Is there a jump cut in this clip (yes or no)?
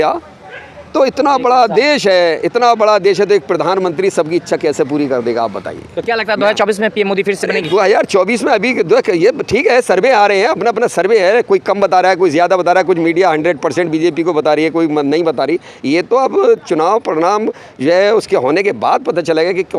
no